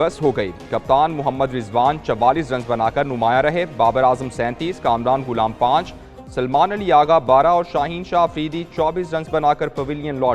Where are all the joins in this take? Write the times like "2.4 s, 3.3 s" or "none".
none